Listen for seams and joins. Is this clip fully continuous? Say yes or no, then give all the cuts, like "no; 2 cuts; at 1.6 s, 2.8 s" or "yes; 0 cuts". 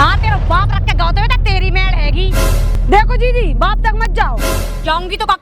no; 1 cut; at 2.7 s